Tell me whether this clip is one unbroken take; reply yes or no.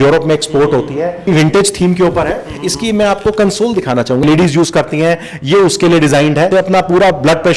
no